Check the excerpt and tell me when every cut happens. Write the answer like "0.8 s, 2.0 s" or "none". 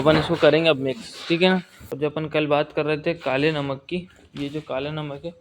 1.8 s